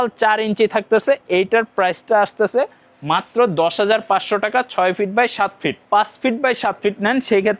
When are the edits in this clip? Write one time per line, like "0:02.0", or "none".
0:05.8